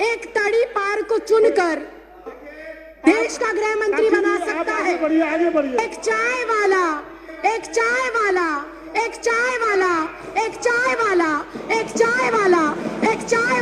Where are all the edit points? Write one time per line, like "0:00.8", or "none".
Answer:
none